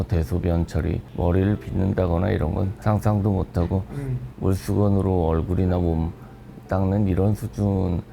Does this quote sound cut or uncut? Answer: cut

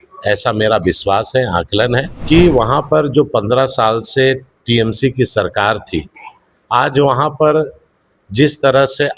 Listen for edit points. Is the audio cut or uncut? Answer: cut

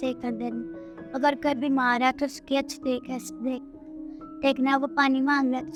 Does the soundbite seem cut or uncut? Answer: uncut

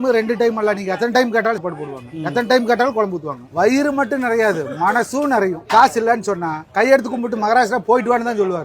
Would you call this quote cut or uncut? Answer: cut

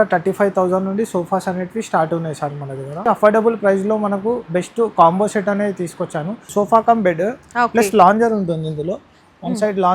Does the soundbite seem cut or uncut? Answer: cut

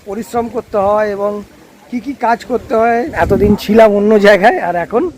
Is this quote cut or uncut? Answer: cut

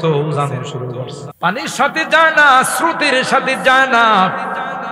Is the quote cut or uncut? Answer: cut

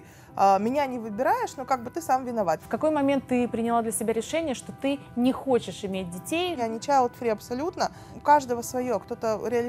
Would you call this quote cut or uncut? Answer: cut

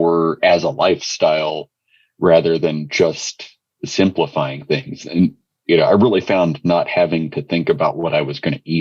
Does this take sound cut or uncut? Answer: uncut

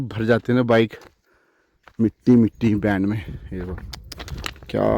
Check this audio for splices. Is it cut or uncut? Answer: uncut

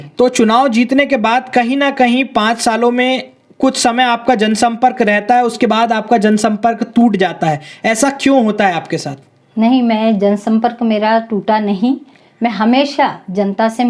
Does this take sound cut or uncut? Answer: uncut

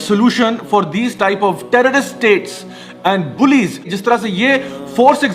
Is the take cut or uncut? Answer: cut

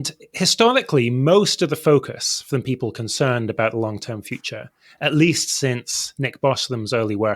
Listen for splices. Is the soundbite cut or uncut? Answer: uncut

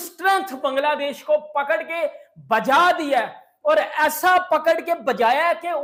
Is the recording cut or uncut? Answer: uncut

